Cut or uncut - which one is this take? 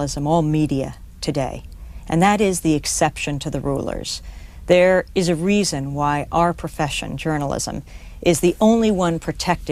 uncut